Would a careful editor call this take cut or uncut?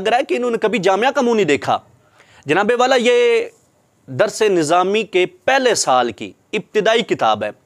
uncut